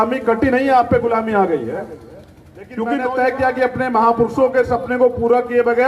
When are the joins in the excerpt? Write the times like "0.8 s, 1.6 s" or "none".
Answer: 2.9 s